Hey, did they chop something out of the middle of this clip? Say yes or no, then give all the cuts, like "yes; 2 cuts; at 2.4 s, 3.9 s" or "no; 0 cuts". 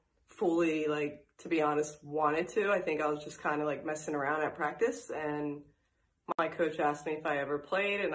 yes; 1 cut; at 6.4 s